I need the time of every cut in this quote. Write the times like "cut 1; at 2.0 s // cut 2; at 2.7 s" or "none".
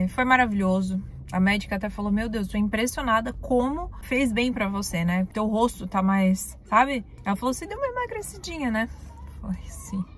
cut 1; at 4.0 s // cut 2; at 5.3 s // cut 3; at 7.1 s